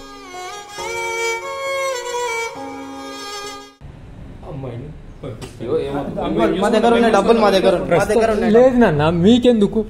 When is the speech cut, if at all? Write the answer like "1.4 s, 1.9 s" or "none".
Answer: 3.9 s